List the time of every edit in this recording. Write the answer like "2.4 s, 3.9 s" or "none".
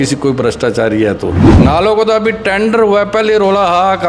1.4 s

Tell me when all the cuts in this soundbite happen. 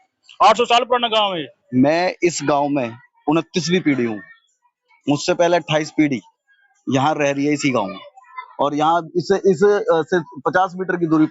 1.5 s

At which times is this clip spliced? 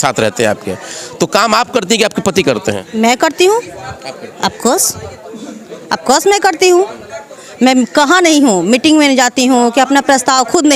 none

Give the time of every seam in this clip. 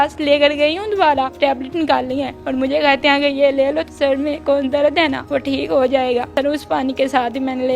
1.3 s, 2.4 s, 3.9 s, 5.2 s, 6.3 s

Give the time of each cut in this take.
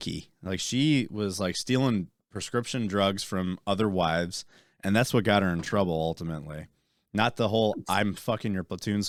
none

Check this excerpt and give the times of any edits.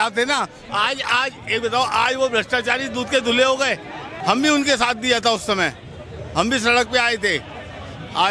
4.1 s

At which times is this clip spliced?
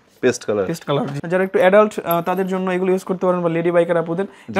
1.2 s

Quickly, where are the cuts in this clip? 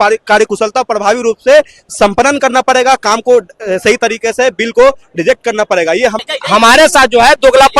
6.2 s

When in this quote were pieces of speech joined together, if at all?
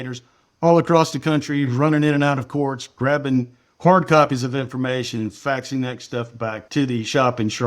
6.7 s

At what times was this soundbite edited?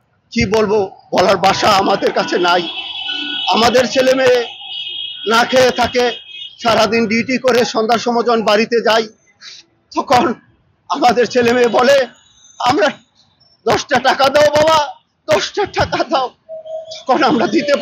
none

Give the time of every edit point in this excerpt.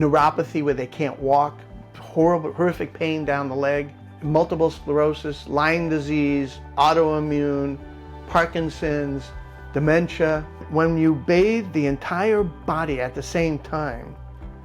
10.6 s

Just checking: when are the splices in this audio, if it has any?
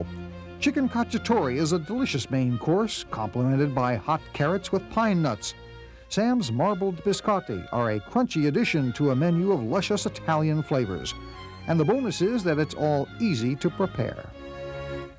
14.1 s

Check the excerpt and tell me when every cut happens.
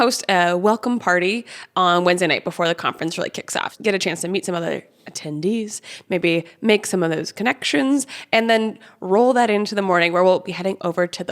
3.7 s

